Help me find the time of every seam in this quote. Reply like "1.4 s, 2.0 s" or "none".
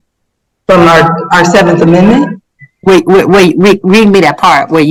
none